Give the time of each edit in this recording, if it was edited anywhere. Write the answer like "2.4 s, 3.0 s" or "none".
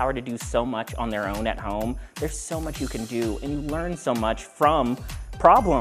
none